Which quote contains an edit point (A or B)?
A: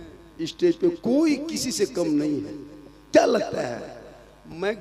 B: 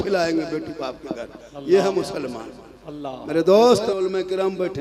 B